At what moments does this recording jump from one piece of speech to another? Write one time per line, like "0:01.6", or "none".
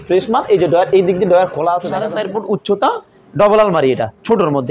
0:02.2